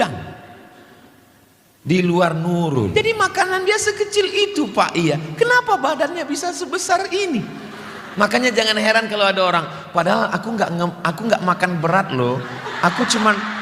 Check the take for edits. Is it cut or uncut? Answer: cut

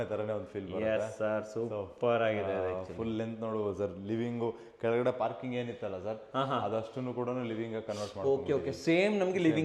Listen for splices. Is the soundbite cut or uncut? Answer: uncut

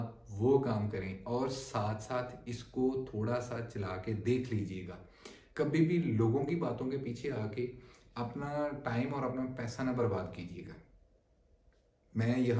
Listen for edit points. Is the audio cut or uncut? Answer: uncut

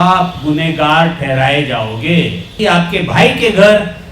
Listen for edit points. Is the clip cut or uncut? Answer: cut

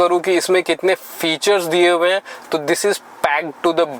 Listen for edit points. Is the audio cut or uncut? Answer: uncut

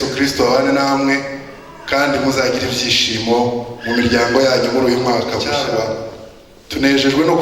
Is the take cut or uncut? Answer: cut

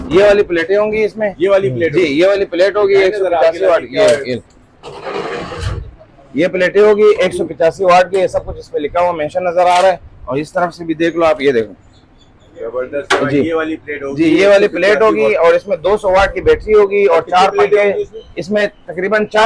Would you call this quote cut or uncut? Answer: uncut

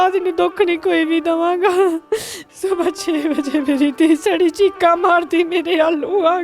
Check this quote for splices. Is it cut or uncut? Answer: cut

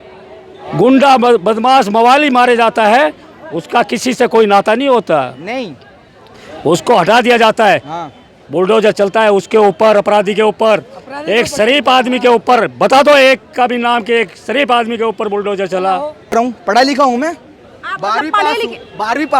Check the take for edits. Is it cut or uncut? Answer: cut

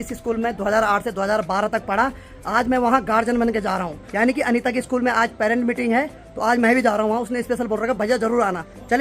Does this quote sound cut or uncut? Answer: uncut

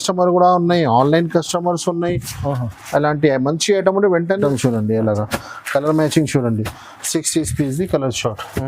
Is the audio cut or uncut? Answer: cut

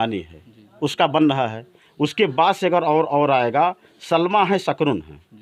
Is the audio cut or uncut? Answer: uncut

